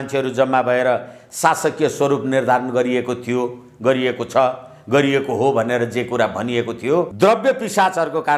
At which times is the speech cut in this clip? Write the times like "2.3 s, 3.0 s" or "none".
7.1 s